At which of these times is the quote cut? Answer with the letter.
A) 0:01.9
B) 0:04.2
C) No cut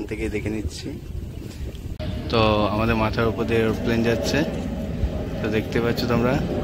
A